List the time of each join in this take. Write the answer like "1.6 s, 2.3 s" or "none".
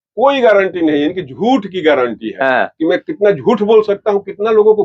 none